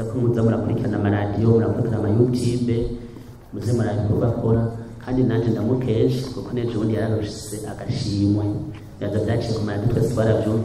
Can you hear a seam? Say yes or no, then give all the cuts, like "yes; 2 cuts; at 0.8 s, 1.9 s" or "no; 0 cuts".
no; 0 cuts